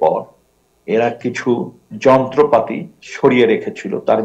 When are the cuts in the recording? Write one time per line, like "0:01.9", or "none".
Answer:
0:01.8